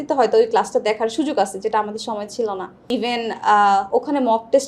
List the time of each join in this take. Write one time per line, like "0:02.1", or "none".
0:02.7